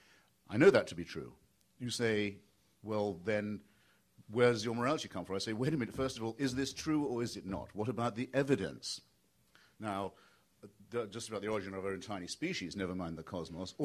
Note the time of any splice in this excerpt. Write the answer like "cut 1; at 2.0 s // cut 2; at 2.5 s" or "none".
cut 1; at 4.8 s

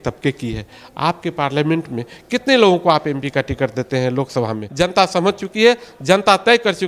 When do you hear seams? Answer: cut 1; at 4.6 s

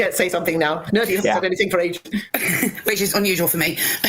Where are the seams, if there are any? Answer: none

